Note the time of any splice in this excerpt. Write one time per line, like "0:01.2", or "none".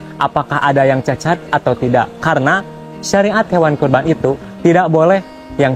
none